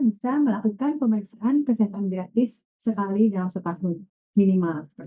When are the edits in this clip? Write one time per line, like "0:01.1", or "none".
none